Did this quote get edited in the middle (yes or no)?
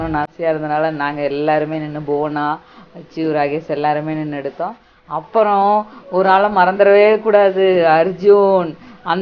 no